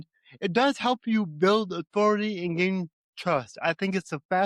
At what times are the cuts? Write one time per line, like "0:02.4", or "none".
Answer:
none